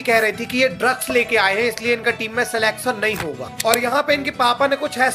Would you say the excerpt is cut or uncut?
cut